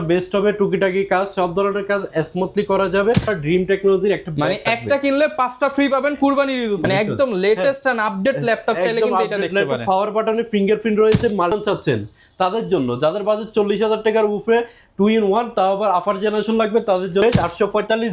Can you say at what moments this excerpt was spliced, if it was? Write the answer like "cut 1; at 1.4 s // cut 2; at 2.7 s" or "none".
cut 1; at 3.3 s // cut 2; at 6.8 s // cut 3; at 11.5 s // cut 4; at 17.2 s